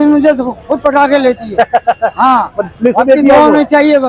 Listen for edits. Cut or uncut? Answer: uncut